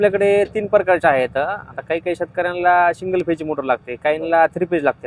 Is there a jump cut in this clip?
no; 0 cuts

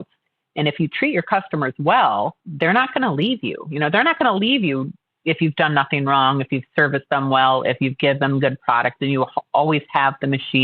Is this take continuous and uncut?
no; 1 cut; at 2.4 s

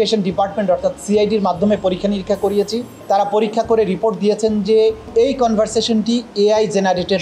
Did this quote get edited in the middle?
yes; 2 cuts; at 2.9 s, 5.1 s

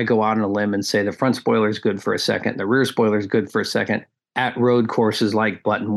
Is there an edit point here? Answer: no; 0 cuts

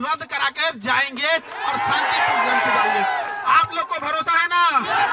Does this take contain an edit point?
no; 0 cuts

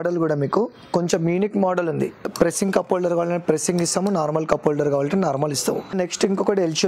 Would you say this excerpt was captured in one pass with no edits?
no; 2 cuts; at 2.3 s, 5.9 s

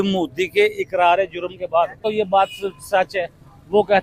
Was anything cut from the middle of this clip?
yes; 1 cut; at 2.0 s

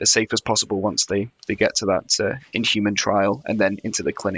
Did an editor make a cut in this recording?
yes; 1 cut; at 2.4 s

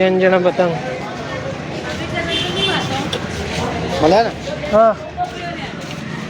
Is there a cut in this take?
no; 0 cuts

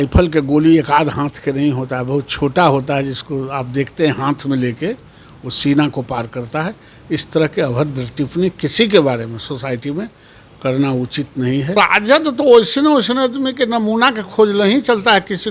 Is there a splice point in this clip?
yes; 1 cut; at 11.7 s

